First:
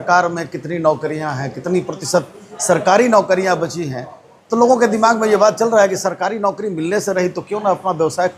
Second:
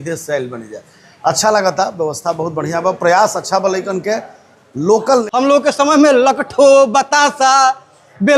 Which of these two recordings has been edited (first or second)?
second